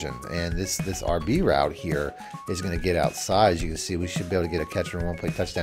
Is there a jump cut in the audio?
no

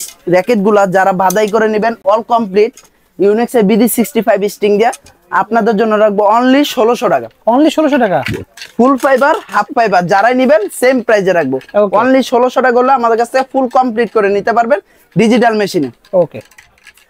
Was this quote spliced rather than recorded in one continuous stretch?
no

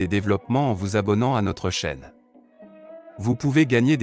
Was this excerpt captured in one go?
yes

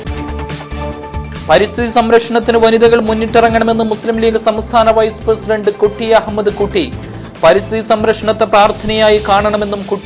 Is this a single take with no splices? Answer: no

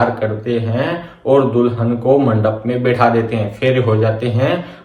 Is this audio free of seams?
yes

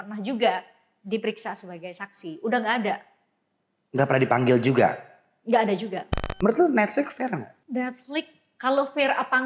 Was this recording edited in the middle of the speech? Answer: yes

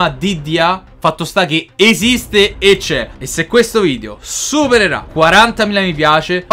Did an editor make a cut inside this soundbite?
no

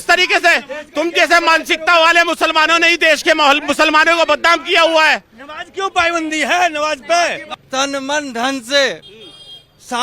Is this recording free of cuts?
no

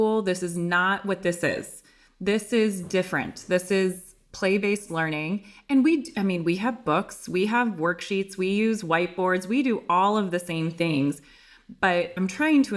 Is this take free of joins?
yes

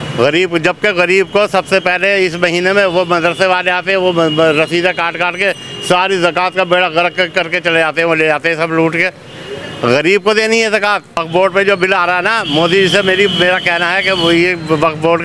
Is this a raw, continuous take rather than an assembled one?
no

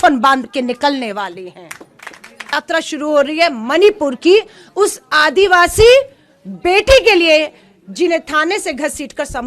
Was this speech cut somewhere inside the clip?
yes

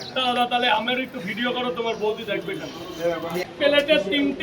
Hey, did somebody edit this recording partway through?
yes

